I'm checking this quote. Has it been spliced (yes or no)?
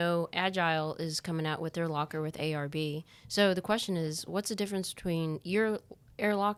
no